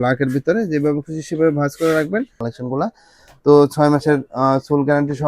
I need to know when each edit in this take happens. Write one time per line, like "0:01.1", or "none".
0:02.4